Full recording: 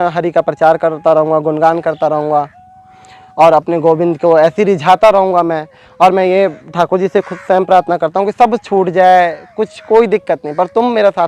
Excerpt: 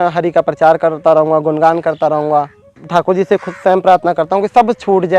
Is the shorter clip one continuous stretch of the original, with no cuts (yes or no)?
no